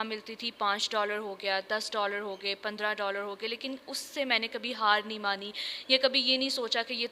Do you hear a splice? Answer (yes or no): no